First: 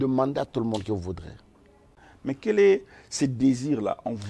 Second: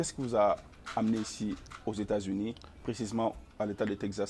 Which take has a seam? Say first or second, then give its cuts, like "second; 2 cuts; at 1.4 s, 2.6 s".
first; 1 cut; at 2.1 s